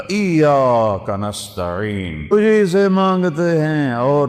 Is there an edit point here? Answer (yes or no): yes